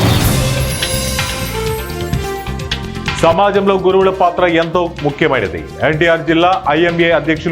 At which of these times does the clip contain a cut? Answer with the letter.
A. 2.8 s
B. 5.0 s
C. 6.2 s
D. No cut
A